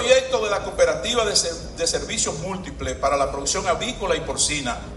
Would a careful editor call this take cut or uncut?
uncut